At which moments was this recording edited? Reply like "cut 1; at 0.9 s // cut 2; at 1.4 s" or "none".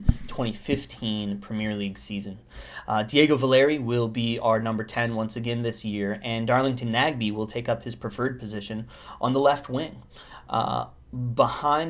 none